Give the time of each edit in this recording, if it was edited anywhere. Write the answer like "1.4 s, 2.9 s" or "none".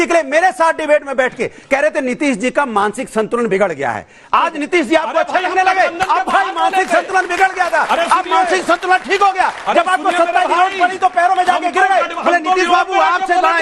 none